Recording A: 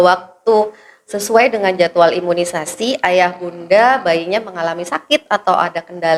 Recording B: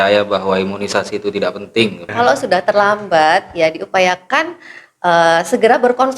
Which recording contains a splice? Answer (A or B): B